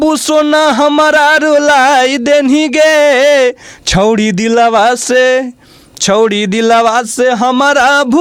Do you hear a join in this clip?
no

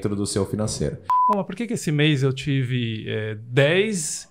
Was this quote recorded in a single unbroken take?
no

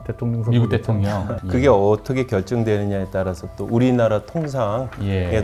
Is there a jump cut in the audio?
yes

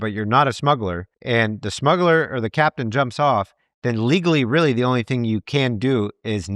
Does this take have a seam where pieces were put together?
yes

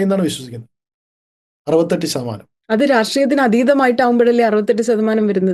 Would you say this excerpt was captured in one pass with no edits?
yes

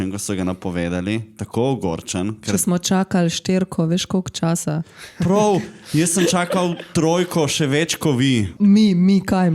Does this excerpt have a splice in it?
yes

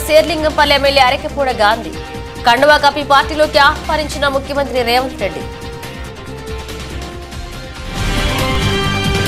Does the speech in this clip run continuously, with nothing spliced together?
no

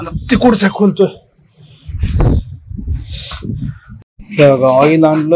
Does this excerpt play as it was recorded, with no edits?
no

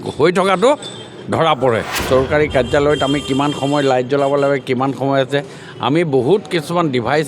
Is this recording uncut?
no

